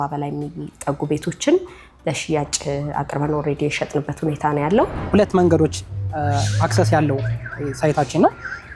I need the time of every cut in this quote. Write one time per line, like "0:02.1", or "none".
0:05.0